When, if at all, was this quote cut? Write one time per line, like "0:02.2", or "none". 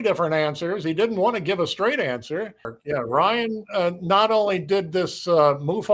0:02.8